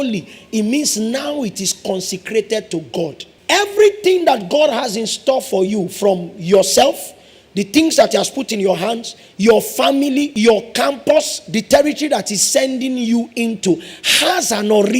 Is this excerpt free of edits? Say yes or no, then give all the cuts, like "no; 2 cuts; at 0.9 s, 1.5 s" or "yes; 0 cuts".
no; 2 cuts; at 3.3 s, 10.3 s